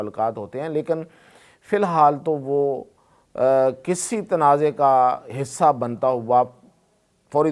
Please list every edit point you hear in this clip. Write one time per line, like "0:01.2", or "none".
none